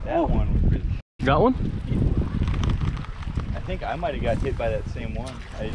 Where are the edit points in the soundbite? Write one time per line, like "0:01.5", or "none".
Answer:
none